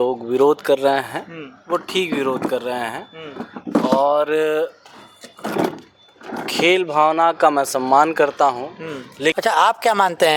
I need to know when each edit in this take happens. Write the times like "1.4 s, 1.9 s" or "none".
9.3 s